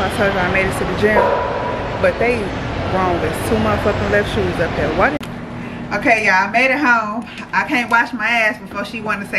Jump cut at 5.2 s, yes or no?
yes